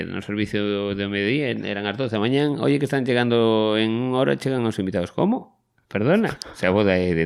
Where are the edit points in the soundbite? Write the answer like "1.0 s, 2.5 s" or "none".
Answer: none